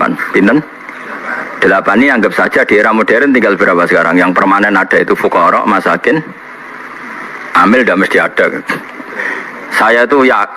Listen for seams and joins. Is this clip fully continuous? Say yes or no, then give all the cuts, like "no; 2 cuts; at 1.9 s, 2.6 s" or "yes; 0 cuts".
yes; 0 cuts